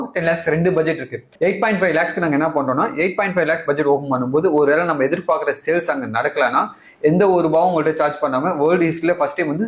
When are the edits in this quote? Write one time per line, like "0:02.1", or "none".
none